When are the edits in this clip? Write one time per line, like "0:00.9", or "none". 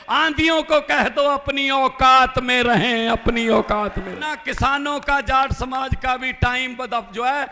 0:04.3